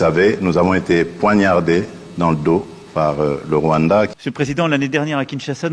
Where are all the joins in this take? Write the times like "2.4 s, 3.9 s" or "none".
4.1 s